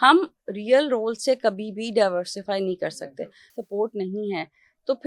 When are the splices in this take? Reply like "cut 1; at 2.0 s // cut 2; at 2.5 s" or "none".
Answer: cut 1; at 3.4 s